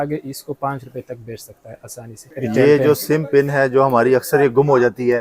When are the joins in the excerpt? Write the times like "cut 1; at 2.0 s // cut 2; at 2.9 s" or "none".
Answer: cut 1; at 2.2 s